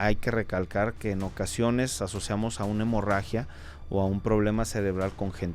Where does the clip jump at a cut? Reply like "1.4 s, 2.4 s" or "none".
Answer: none